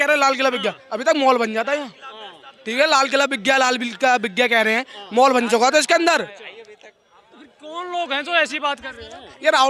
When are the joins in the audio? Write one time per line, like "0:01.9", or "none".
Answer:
none

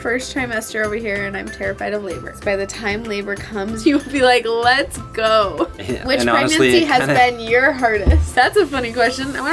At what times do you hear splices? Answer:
0:02.4
0:03.8
0:05.7
0:08.3

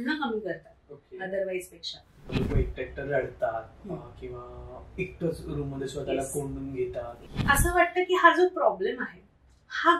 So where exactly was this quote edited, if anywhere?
0:02.3
0:07.2

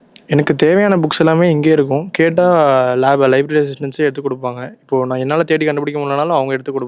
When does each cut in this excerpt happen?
none

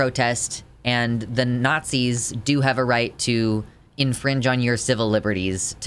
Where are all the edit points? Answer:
none

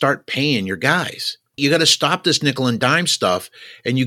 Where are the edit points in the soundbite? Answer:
0:01.5

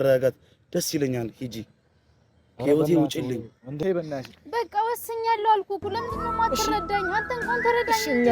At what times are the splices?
0:03.8

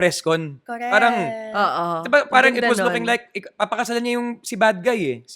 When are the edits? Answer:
none

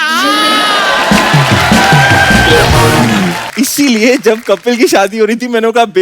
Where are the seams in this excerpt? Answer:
0:03.4

